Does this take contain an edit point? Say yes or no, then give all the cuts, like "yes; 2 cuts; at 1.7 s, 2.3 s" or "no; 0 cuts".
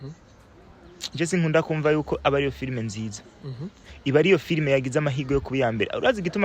no; 0 cuts